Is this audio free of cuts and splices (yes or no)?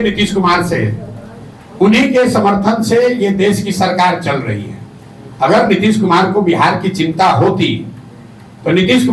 yes